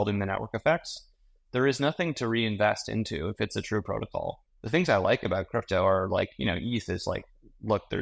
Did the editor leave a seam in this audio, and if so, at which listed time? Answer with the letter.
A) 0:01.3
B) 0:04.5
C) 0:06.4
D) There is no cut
B